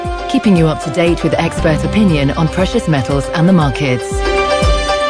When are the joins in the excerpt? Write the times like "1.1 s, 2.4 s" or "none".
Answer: none

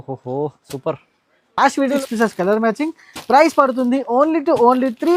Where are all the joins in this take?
2.0 s

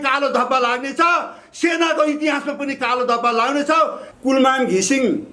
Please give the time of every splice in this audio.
4.0 s

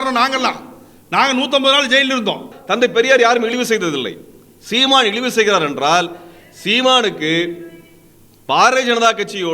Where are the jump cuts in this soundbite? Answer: 2.5 s

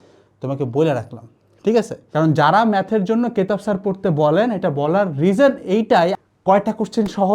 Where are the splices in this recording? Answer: 2.0 s, 6.1 s

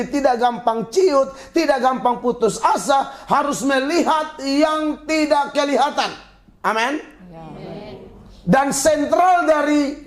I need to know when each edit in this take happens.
none

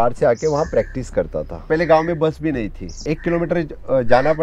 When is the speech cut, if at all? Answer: 1.6 s, 3.0 s

